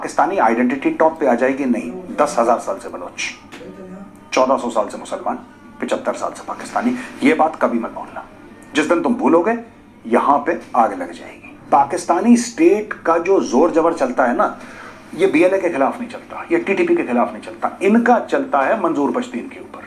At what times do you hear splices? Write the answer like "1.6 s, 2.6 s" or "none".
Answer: 11.5 s